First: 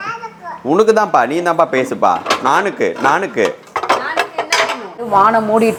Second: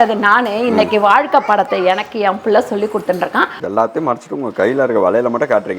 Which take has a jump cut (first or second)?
second